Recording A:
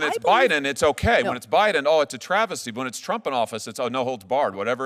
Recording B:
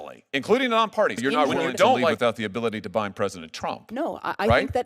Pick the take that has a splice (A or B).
B